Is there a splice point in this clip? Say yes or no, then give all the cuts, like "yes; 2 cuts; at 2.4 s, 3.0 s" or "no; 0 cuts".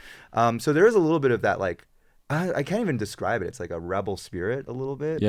no; 0 cuts